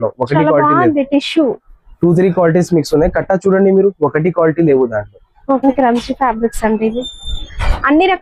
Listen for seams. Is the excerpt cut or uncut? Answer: cut